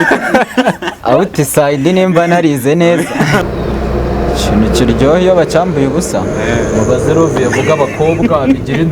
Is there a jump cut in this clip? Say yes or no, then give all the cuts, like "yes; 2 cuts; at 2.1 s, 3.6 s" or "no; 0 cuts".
yes; 1 cut; at 3.4 s